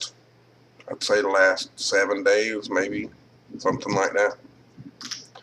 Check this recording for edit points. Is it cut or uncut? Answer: cut